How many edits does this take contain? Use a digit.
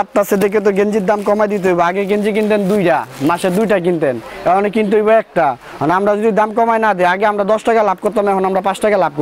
0